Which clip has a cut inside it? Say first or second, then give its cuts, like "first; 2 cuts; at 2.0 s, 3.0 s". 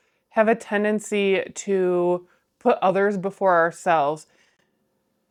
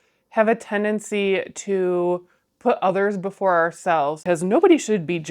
second; 1 cut; at 4.2 s